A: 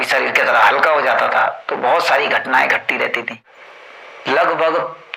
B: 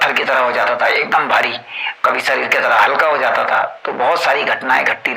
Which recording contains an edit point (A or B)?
A